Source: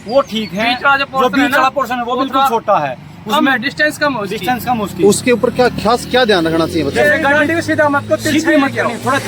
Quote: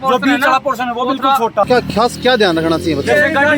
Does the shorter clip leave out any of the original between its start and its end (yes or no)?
yes